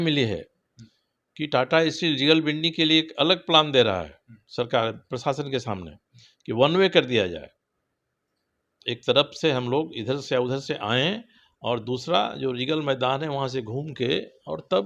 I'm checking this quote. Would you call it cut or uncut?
uncut